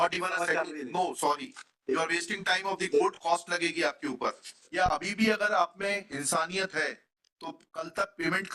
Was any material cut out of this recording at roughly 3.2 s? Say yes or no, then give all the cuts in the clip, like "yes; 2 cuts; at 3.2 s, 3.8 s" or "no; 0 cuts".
no; 1 cut; at 4.6 s